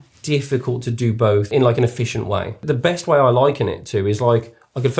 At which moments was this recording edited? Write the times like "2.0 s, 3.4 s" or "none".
1.5 s, 2.6 s